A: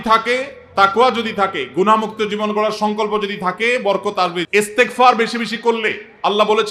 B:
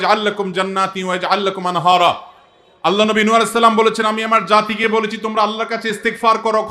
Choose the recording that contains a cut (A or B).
A